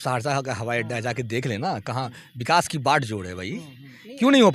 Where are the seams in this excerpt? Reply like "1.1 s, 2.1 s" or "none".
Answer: none